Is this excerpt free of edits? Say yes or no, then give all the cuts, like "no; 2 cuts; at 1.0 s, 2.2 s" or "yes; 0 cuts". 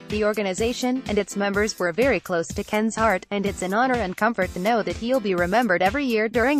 no; 1 cut; at 3.6 s